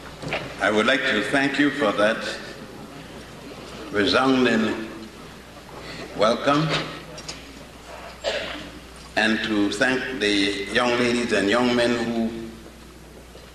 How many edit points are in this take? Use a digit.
1